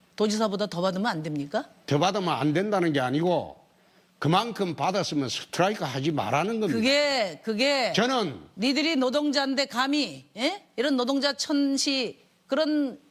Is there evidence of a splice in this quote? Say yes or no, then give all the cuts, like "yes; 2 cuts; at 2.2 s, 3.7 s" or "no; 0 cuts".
no; 0 cuts